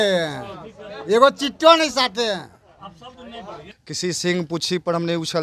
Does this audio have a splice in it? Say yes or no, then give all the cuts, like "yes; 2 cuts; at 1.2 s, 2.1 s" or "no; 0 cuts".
yes; 1 cut; at 3.7 s